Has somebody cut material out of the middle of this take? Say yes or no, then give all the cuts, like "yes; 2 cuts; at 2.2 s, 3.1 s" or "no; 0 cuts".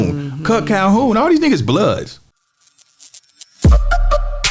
yes; 1 cut; at 2.5 s